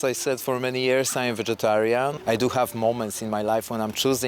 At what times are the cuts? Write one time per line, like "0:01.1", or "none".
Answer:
0:02.2